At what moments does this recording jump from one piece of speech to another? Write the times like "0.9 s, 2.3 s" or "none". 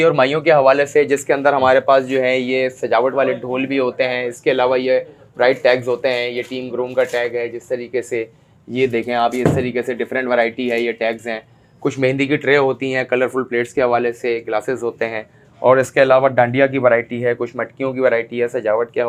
none